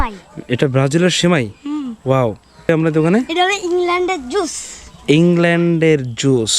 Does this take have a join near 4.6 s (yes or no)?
no